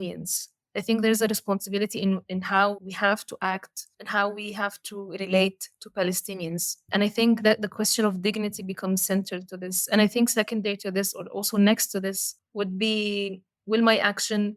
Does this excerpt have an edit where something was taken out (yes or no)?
yes